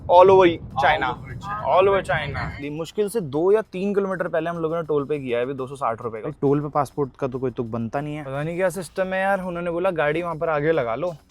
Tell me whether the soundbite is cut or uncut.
cut